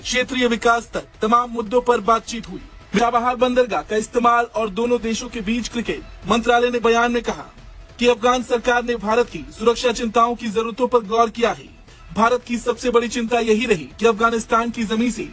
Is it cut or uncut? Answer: cut